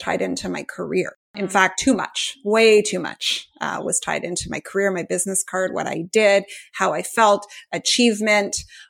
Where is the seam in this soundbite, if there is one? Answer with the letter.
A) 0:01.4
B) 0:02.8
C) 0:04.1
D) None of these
A